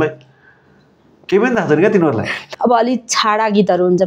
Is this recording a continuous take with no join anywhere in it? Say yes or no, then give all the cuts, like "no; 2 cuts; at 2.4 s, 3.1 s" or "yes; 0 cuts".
no; 1 cut; at 2.4 s